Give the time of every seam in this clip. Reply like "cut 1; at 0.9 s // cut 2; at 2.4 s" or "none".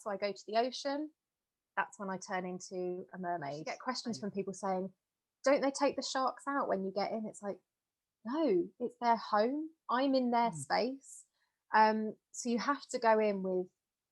cut 1; at 3.9 s